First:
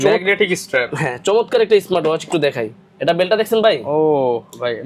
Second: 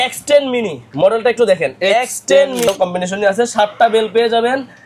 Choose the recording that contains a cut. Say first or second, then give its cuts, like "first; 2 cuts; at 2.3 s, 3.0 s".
second; 1 cut; at 2.7 s